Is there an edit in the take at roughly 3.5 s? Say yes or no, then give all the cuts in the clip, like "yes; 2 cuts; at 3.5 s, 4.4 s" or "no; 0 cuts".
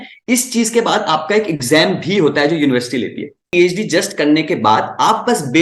yes; 1 cut; at 3.5 s